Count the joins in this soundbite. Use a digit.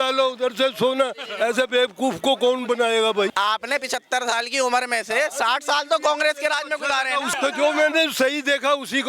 2